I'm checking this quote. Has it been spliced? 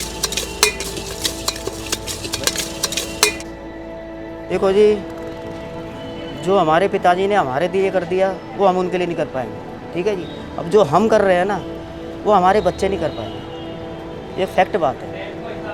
no; 0 cuts

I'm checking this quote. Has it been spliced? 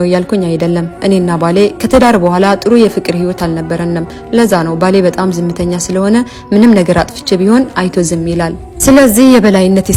no; 0 cuts

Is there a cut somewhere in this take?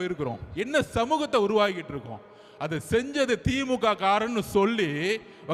no; 0 cuts

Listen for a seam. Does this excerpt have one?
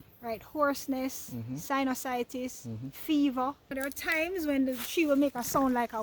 yes; 1 cut; at 3.7 s

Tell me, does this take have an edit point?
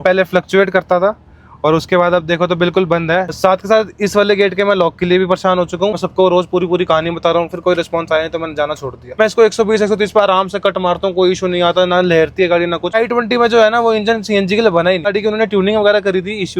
yes; 5 cuts; at 3.3 s, 5.9 s, 9.0 s, 13.0 s, 15.1 s

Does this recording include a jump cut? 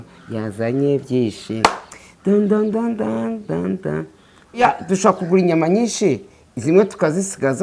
yes; 1 cut; at 4.6 s

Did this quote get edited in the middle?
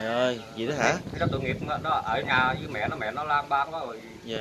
no; 0 cuts

